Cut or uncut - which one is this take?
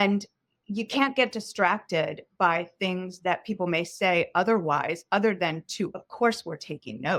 uncut